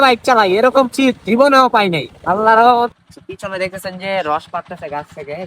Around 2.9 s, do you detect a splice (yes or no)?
yes